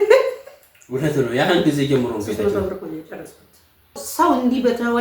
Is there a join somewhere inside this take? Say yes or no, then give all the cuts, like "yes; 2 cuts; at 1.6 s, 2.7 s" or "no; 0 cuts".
yes; 1 cut; at 4.0 s